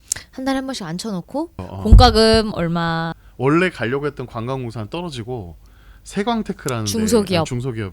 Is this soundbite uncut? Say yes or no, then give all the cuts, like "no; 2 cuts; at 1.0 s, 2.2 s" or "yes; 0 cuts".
no; 2 cuts; at 1.7 s, 3.2 s